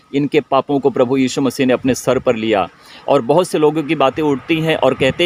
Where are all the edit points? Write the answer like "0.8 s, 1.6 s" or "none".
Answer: none